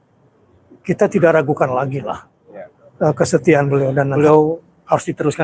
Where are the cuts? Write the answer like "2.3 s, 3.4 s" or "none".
4.1 s